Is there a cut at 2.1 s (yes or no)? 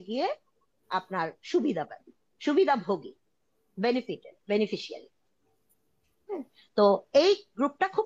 no